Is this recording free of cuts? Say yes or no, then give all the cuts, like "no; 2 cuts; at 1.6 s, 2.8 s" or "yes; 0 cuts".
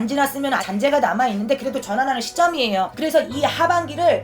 no; 1 cut; at 2.9 s